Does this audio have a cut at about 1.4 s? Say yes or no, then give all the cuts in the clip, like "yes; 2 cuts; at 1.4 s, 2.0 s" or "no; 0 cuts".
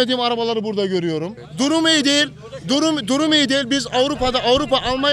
yes; 1 cut; at 1.4 s